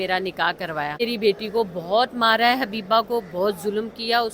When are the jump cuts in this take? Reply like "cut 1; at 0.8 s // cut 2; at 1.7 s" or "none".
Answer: cut 1; at 1.0 s

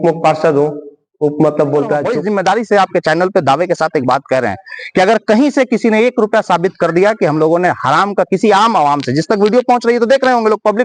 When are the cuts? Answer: cut 1; at 2.1 s

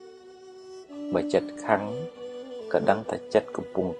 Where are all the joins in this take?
none

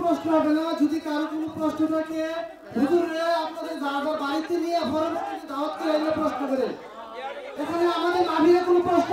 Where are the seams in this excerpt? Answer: cut 1; at 7.5 s

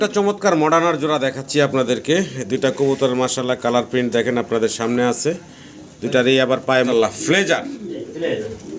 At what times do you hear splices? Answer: cut 1; at 6.9 s

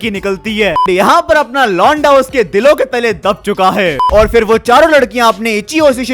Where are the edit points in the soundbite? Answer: cut 1; at 0.8 s // cut 2; at 4.0 s

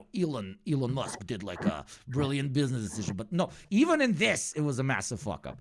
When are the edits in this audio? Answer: cut 1; at 3.6 s

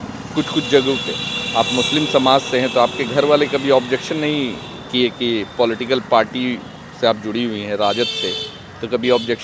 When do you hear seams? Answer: none

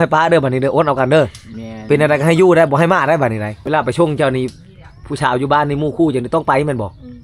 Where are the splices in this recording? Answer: cut 1; at 3.5 s

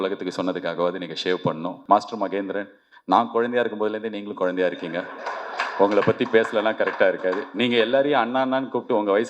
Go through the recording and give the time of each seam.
cut 1; at 1.8 s

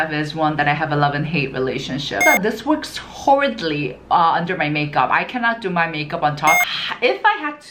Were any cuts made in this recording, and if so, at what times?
cut 1; at 2.2 s // cut 2; at 6.6 s

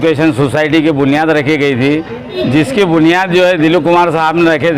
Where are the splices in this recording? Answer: cut 1; at 2.4 s

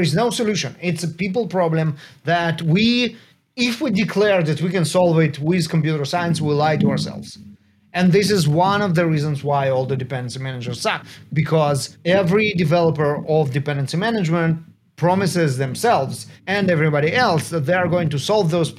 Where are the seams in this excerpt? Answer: none

